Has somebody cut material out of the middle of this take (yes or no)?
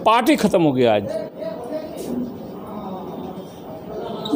no